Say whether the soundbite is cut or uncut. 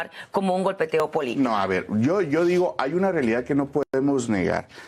cut